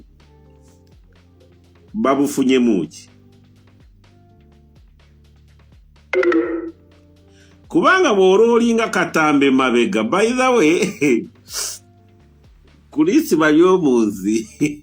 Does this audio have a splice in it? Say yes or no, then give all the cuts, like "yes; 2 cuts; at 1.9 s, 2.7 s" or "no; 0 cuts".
no; 0 cuts